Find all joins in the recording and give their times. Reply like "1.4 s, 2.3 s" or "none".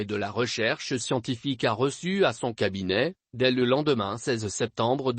0.9 s